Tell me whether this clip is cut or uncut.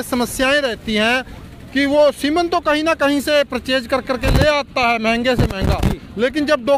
uncut